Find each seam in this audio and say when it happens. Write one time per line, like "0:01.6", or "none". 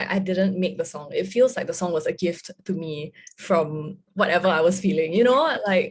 none